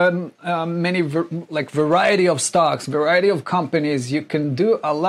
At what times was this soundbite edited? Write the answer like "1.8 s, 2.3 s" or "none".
none